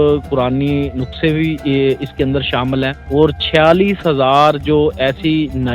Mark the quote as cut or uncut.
cut